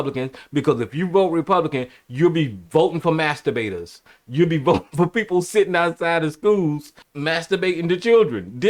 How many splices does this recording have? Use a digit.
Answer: 0